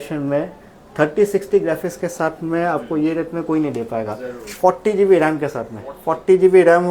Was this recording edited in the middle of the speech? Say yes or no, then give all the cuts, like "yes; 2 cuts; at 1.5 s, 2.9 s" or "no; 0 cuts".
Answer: no; 0 cuts